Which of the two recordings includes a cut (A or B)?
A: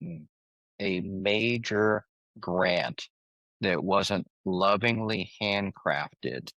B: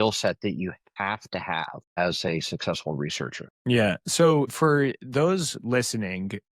B